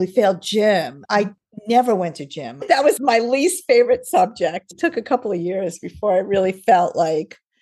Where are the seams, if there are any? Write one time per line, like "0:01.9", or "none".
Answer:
0:01.0
0:03.0
0:04.6